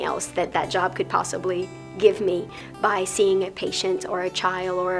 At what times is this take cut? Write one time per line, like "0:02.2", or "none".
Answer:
none